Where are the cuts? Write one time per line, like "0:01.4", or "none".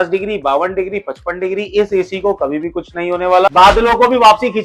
0:03.5